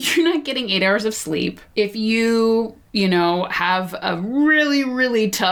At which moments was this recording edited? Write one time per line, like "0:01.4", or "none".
0:01.6
0:02.8